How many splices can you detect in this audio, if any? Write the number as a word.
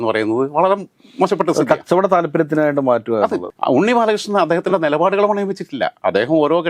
one